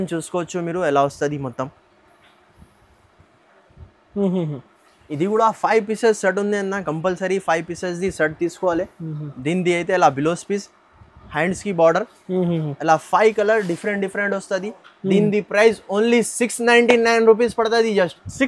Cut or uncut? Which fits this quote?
uncut